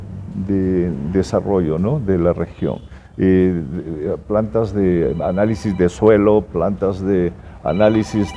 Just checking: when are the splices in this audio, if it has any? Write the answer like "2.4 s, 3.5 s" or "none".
none